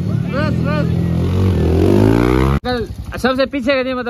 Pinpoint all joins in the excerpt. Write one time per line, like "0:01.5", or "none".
0:02.6